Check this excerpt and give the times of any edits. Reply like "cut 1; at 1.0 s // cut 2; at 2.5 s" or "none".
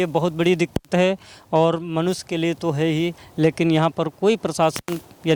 none